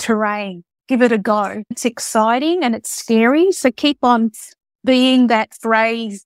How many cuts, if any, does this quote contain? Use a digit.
1